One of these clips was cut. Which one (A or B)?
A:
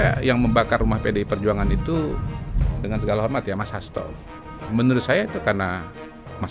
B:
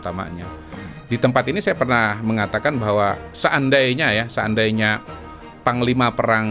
A